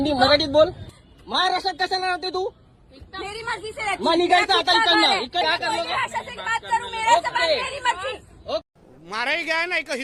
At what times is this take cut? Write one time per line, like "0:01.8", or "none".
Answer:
0:01.0
0:05.4
0:08.7